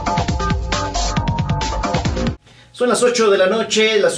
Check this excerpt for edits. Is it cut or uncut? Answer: cut